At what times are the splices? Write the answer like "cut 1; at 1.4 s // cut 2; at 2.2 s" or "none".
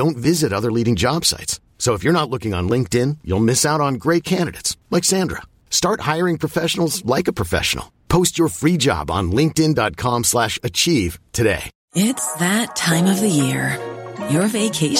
cut 1; at 11.7 s